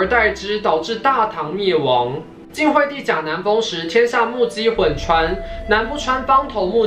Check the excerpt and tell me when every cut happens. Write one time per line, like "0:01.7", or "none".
none